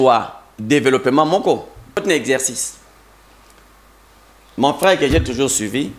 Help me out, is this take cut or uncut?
cut